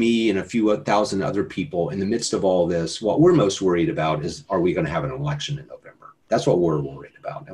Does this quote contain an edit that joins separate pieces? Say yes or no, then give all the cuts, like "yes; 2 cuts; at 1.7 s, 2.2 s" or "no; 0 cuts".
no; 0 cuts